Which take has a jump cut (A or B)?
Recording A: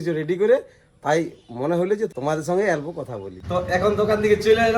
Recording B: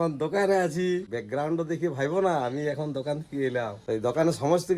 A